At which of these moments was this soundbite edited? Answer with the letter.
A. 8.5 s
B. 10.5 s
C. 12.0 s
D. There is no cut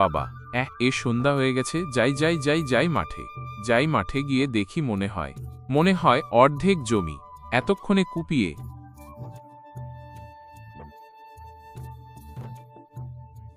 A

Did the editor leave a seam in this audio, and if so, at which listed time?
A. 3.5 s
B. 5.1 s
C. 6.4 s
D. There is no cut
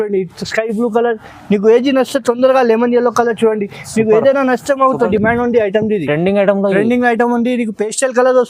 B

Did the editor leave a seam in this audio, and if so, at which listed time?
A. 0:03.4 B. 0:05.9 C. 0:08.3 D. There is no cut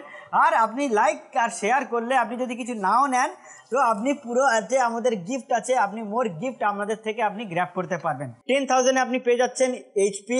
C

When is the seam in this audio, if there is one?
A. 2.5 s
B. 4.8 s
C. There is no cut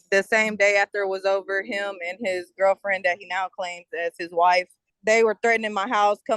B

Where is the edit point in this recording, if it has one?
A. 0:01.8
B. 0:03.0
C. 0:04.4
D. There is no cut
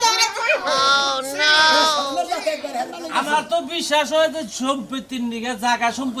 B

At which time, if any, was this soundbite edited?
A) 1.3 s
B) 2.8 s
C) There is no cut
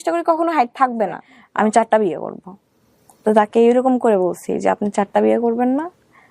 A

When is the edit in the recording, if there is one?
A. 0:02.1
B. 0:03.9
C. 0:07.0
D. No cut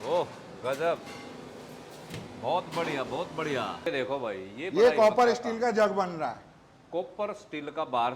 B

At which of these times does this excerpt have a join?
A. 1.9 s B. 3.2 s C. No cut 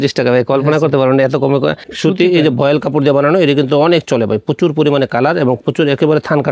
A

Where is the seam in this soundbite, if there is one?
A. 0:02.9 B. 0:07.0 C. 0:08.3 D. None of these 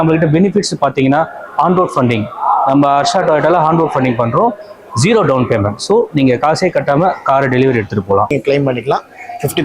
C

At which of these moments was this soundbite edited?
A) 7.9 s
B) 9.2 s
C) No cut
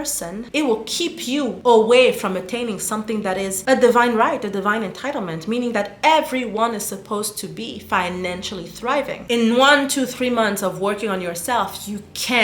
B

